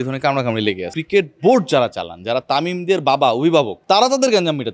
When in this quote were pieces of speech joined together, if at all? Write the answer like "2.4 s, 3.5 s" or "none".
0.9 s, 3.8 s